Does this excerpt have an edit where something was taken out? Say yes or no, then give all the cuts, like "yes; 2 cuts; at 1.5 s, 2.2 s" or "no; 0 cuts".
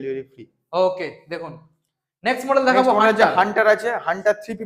no; 0 cuts